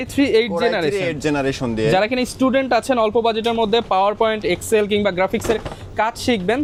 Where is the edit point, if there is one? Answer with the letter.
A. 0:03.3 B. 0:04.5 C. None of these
C